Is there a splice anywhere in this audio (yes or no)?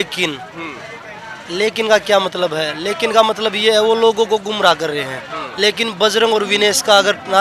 no